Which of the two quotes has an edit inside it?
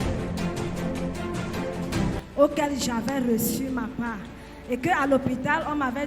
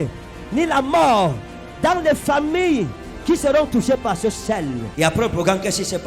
first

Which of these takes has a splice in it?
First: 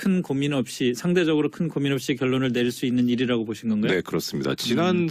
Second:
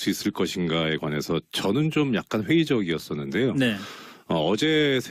first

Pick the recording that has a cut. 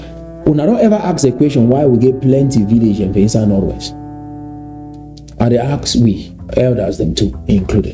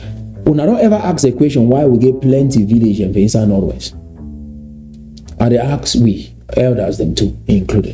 second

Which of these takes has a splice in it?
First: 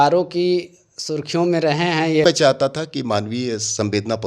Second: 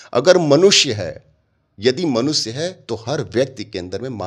first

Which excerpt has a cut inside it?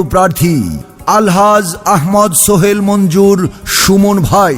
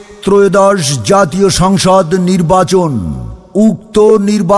first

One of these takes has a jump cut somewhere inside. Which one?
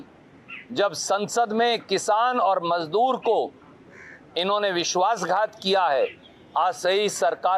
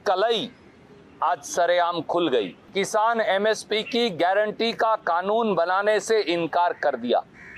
second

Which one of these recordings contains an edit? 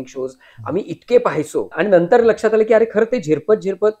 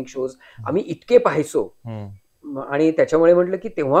first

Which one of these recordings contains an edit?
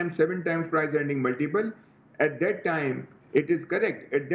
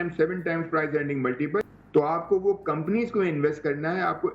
second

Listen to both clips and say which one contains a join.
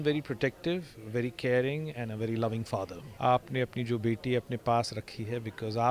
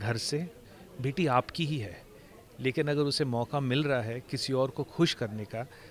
first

